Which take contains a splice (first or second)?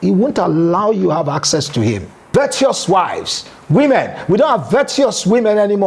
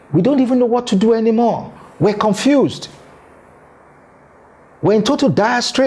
first